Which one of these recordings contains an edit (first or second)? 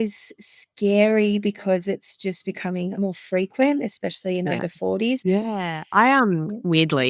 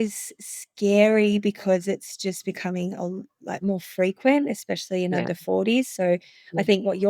first